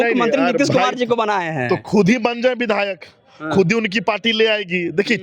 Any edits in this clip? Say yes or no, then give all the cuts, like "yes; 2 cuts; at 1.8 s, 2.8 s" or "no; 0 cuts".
no; 0 cuts